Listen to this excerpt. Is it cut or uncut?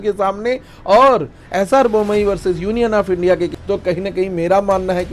cut